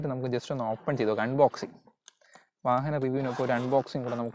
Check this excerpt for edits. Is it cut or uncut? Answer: uncut